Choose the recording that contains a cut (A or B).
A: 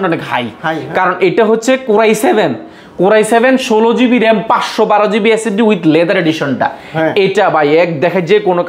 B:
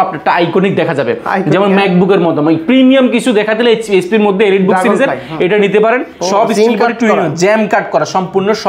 B